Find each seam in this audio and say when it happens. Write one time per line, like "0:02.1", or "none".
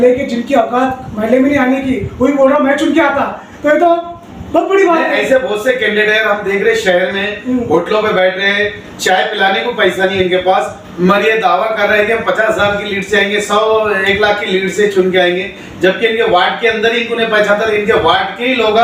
none